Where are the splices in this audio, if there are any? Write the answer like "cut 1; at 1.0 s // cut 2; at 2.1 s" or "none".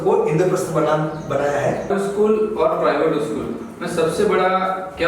cut 1; at 1.9 s